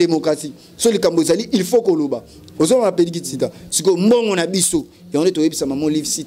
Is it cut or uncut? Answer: uncut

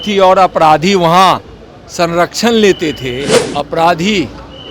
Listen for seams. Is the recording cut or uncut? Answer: cut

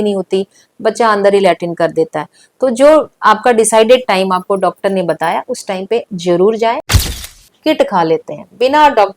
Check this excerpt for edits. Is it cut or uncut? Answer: cut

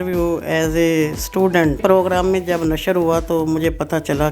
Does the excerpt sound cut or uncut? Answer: cut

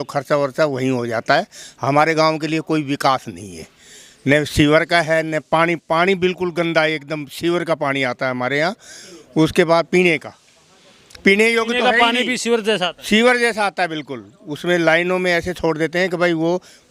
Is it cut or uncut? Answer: uncut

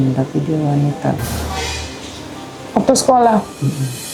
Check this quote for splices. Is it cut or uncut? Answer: uncut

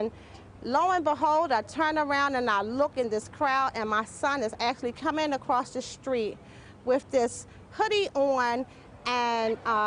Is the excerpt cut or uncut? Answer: cut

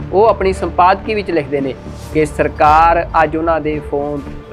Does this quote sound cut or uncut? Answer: uncut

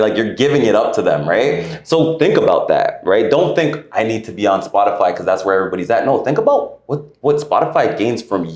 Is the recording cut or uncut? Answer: uncut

